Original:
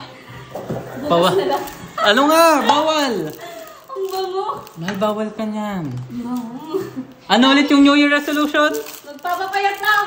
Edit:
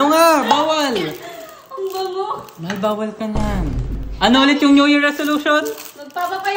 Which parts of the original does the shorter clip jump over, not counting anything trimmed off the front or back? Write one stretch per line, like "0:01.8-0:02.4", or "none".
0:06.1-0:07.0